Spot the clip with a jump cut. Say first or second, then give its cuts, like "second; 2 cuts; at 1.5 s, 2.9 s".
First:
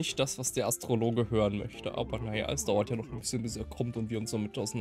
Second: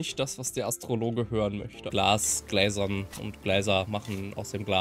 second; 1 cut; at 1.9 s